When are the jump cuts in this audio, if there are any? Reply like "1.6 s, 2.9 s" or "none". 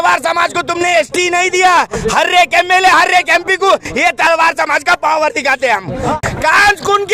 6.2 s